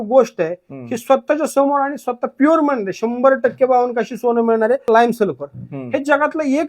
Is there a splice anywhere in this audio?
yes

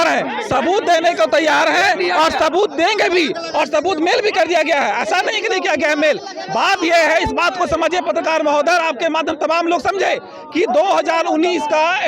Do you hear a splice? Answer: no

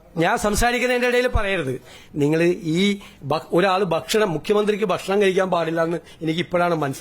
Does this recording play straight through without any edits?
no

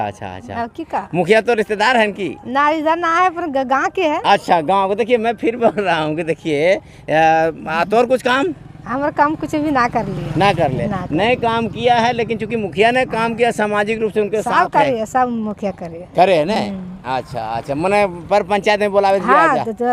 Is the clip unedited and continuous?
yes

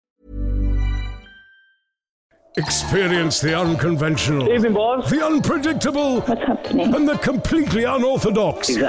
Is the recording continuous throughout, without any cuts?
no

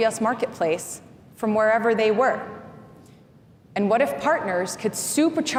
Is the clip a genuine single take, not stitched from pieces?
yes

